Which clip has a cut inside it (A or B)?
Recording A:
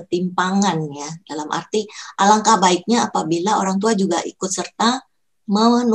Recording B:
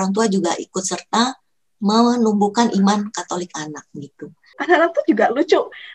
B